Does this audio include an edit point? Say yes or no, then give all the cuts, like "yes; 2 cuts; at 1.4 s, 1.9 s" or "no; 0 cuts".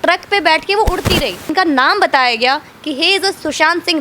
yes; 1 cut; at 1.5 s